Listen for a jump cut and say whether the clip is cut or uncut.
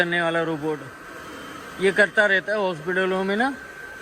uncut